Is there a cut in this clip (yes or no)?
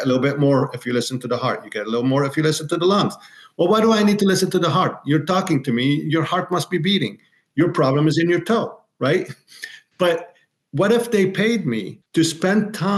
yes